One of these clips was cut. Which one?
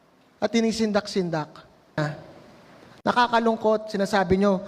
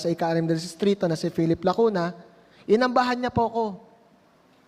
first; 1 cut; at 1.9 s

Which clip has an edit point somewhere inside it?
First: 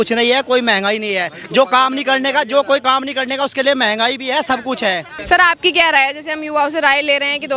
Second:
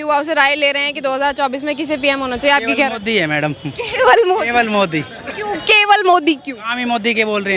first; 1 cut; at 5.1 s

